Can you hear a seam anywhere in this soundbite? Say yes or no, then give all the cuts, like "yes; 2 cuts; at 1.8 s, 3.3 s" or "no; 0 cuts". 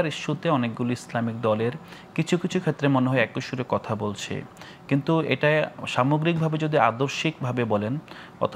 no; 0 cuts